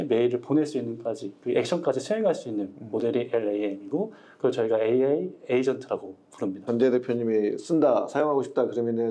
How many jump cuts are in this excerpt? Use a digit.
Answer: 1